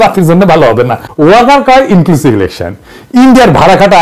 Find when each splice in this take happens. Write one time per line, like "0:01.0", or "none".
0:01.0